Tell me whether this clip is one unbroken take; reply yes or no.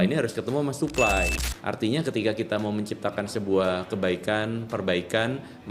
no